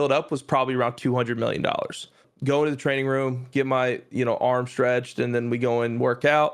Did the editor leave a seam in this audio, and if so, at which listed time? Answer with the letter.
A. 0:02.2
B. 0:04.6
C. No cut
A